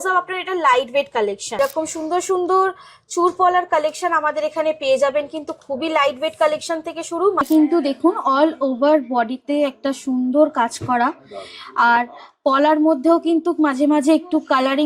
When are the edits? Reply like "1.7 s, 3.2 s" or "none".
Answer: 1.6 s, 7.4 s